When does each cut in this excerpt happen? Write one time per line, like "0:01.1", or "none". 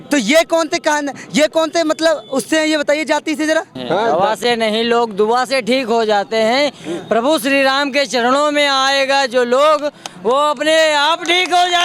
0:03.8